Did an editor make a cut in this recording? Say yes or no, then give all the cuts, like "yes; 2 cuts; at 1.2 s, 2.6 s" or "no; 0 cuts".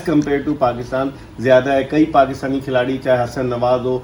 no; 0 cuts